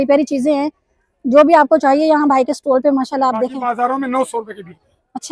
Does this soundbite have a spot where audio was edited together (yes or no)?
yes